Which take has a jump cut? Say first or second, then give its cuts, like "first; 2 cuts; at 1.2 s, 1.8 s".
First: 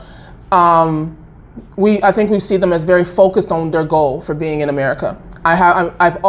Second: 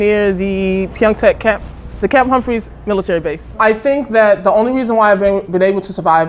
second; 1 cut; at 3.4 s